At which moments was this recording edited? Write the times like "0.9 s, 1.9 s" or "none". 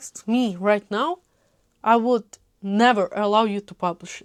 none

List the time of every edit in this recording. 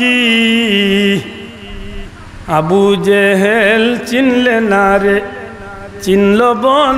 none

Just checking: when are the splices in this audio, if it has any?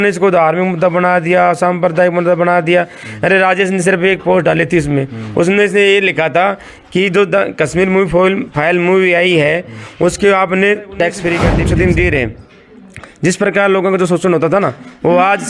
11.6 s

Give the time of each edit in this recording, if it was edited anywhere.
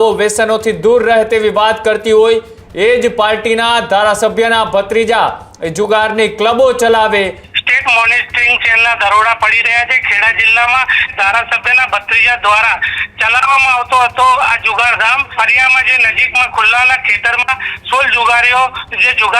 7.4 s, 11.1 s, 15.3 s

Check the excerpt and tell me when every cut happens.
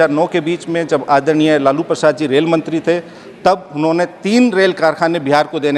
none

